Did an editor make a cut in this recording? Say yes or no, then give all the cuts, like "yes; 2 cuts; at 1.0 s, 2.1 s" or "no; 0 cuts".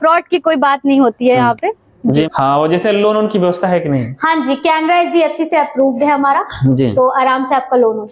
yes; 1 cut; at 2.3 s